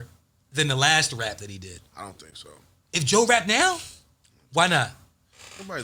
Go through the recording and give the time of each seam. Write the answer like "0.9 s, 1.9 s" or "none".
none